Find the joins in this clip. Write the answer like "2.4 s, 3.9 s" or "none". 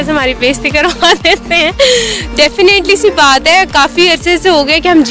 none